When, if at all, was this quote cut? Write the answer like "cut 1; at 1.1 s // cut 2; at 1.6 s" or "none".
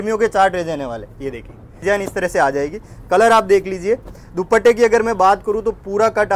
cut 1; at 1.7 s